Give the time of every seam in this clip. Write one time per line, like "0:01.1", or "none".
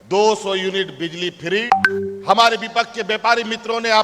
0:01.7